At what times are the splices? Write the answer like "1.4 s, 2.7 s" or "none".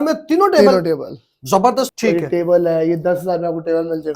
1.9 s